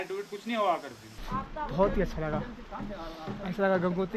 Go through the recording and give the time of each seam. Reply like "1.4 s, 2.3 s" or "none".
1.1 s